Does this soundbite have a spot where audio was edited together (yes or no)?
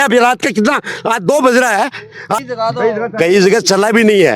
yes